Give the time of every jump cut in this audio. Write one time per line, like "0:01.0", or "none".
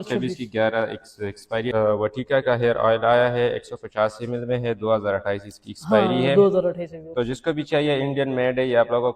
0:01.7
0:03.4

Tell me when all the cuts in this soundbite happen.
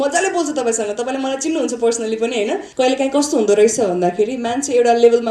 0:02.6

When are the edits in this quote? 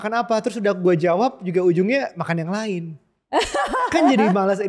none

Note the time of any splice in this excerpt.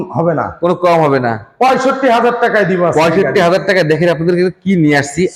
none

